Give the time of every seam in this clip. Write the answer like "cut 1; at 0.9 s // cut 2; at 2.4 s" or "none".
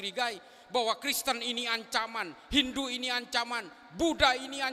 none